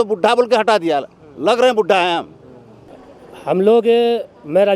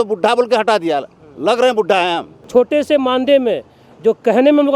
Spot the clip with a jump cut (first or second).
second